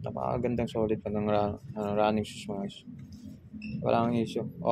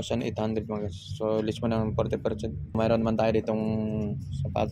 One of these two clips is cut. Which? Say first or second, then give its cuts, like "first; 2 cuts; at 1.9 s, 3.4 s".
second; 1 cut; at 2.8 s